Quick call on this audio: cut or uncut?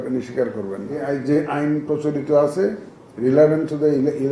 cut